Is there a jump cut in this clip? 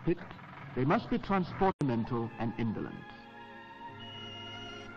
no; 0 cuts

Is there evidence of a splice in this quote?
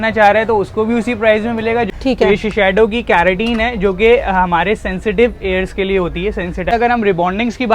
yes; 2 cuts; at 1.9 s, 6.7 s

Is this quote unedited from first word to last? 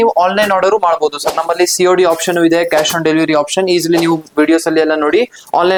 yes; 0 cuts

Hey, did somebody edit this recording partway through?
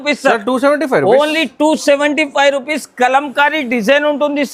no; 0 cuts

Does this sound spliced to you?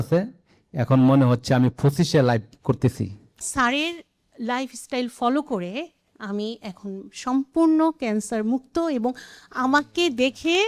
yes; 1 cut; at 3.4 s

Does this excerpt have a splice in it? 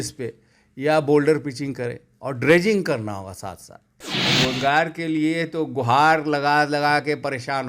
yes; 1 cut; at 4.1 s

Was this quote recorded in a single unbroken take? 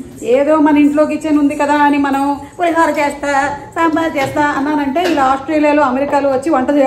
yes; 0 cuts

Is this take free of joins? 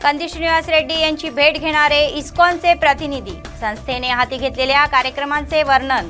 yes; 0 cuts

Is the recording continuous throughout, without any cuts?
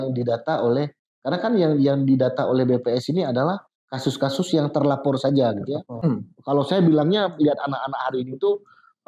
no; 1 cut; at 6.2 s

